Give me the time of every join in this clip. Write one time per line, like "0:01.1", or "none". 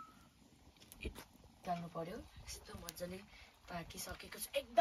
0:01.6